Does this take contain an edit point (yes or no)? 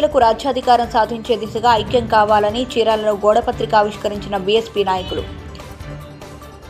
no